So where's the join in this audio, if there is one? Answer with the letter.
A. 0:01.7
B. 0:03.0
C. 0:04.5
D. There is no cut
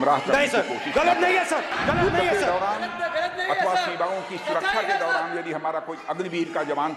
A